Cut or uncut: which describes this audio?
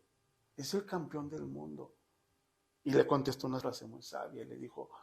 cut